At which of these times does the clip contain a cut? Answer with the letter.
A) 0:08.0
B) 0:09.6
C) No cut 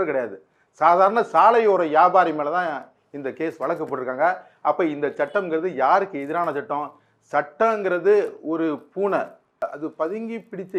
B